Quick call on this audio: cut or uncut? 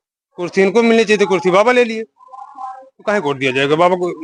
uncut